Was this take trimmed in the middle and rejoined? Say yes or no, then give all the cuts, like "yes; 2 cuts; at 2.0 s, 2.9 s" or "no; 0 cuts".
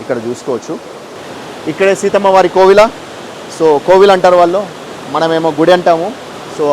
yes; 1 cut; at 1.1 s